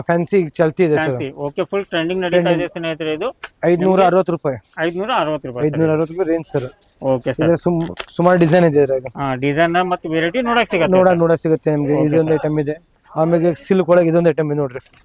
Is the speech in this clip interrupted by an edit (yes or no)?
no